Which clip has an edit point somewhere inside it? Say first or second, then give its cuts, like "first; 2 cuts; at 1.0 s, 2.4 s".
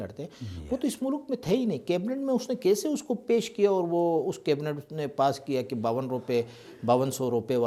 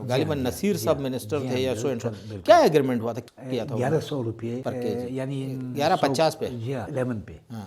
second; 4 cuts; at 3.2 s, 4.6 s, 5.7 s, 6.9 s